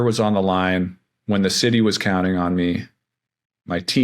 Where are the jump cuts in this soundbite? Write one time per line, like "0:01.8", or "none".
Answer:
none